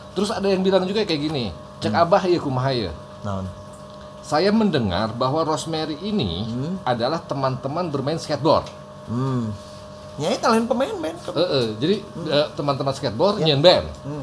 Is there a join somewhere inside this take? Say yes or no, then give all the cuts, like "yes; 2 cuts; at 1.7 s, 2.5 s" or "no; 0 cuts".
no; 0 cuts